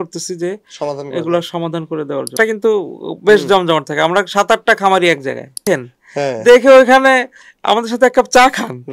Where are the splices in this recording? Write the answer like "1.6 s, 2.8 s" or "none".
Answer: 2.4 s, 5.6 s